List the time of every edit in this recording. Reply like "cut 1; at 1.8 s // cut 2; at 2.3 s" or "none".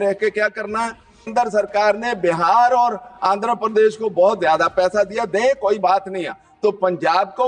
cut 1; at 1.2 s